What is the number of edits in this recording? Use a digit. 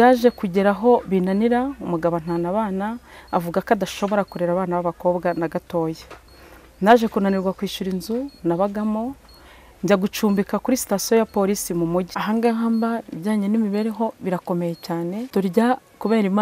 2